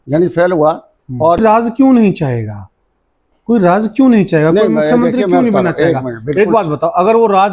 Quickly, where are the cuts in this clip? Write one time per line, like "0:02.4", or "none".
0:01.4

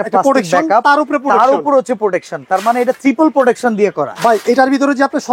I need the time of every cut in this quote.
none

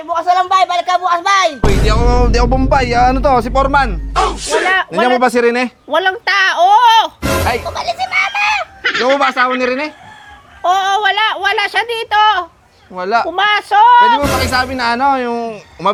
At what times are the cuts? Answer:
none

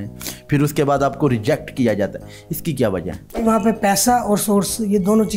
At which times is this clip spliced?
0:03.4

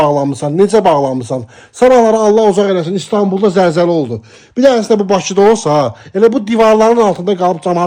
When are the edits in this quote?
none

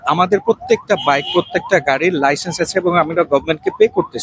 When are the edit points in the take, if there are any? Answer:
none

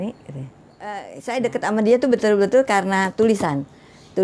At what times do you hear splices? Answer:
0:01.1

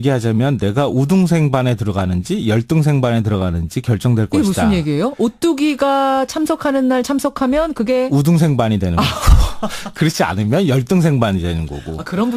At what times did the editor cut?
none

